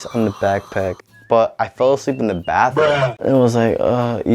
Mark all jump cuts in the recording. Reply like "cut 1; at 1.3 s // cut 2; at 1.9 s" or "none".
cut 1; at 1.1 s // cut 2; at 3.2 s